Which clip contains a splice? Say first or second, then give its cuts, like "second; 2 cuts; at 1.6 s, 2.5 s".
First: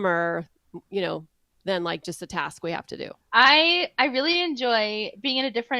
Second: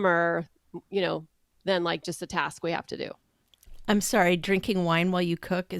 first; 1 cut; at 3.2 s